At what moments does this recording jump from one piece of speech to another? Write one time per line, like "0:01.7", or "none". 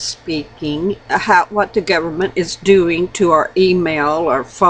0:02.3